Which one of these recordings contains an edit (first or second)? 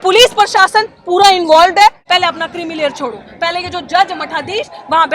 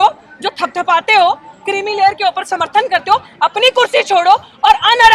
first